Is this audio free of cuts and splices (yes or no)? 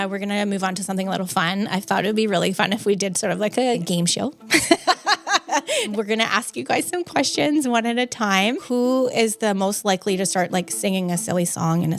no